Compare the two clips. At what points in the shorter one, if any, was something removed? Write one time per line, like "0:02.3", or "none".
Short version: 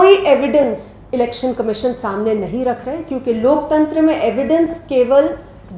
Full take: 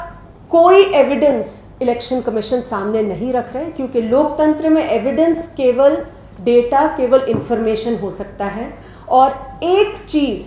none